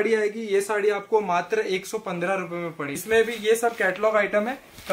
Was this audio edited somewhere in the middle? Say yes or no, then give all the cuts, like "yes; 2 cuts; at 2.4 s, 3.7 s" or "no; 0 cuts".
yes; 1 cut; at 2.9 s